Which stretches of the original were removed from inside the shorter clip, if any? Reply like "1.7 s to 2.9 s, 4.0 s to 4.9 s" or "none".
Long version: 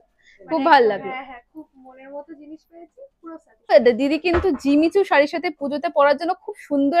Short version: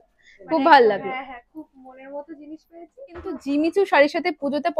3.4 s to 4.6 s